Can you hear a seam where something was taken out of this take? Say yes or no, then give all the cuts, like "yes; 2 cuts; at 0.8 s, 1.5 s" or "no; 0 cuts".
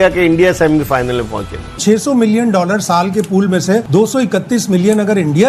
yes; 2 cuts; at 1.8 s, 3.9 s